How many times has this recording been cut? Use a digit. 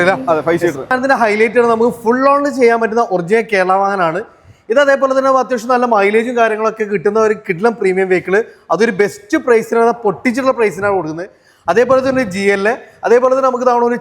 1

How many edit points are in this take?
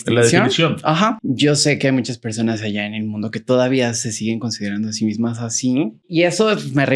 2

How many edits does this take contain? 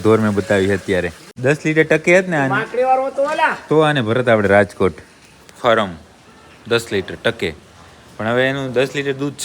1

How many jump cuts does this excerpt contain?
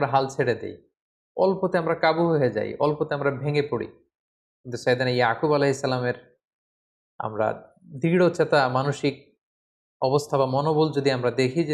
0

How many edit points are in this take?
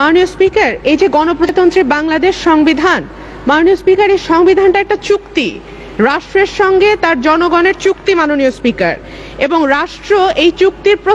1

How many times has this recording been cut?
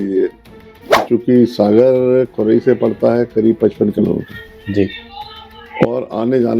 1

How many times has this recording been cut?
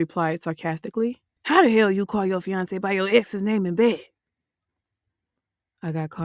1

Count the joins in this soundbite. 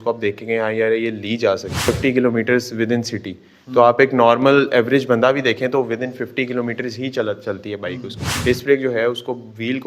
2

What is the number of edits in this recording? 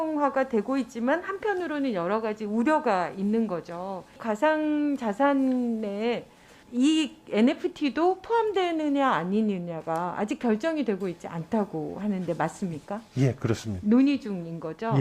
1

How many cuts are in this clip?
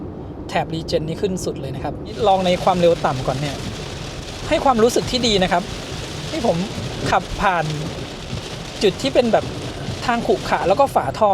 1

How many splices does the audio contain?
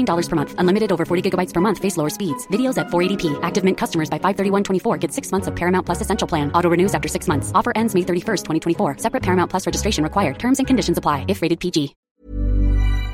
1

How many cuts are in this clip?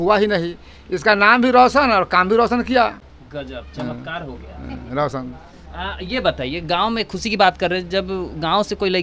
0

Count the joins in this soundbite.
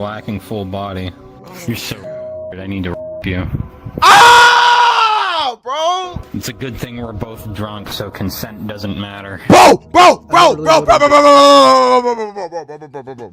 1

